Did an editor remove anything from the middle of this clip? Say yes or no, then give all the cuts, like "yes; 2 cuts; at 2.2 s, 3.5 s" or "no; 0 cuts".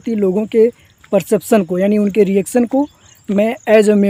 no; 0 cuts